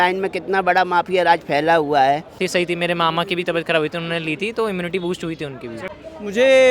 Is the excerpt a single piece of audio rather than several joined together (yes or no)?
no